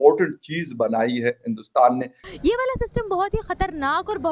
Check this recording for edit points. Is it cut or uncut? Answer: cut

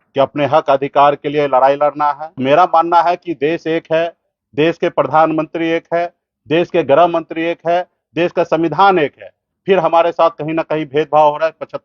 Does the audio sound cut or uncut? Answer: cut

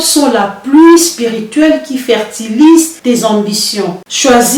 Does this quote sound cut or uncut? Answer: uncut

